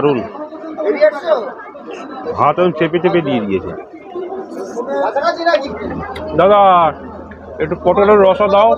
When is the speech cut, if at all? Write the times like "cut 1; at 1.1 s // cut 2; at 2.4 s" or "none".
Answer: cut 1; at 5.7 s